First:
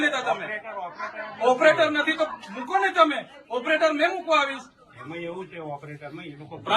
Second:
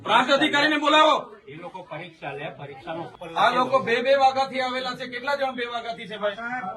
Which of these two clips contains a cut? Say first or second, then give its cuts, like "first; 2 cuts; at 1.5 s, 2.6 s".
second; 1 cut; at 3.1 s